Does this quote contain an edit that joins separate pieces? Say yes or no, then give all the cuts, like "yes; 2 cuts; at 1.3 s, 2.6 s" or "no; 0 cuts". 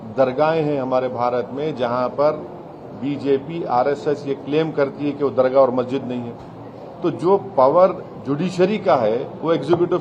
no; 0 cuts